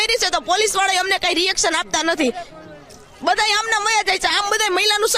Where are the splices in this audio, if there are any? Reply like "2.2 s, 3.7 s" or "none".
none